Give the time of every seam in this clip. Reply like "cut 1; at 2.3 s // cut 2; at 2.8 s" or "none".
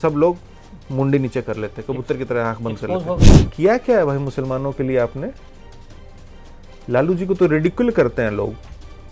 cut 1; at 3.3 s